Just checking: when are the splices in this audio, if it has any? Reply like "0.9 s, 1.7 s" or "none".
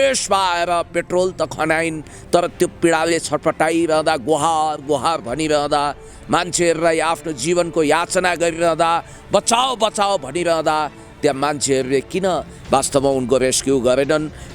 none